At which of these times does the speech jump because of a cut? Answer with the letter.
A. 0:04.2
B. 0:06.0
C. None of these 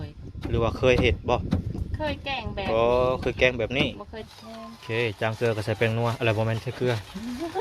A